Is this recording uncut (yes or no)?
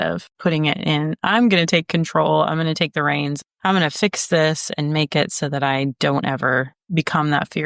yes